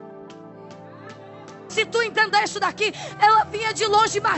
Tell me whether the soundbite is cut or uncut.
cut